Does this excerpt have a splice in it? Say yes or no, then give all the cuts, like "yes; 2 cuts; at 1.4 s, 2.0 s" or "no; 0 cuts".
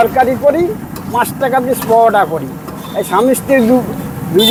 no; 0 cuts